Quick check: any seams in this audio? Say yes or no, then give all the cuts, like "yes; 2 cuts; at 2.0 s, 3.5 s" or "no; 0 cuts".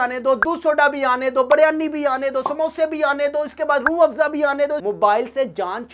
yes; 1 cut; at 4.8 s